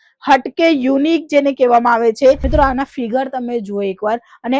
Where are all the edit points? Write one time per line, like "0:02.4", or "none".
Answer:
0:02.4